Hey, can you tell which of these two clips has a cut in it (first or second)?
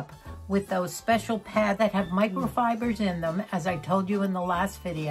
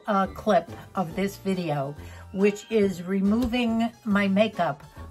first